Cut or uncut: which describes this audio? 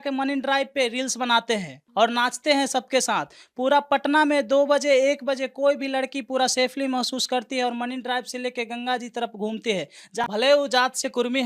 cut